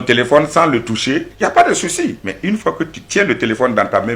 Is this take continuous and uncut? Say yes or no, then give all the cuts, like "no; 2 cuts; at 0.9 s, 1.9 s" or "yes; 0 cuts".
no; 2 cuts; at 1.3 s, 2.3 s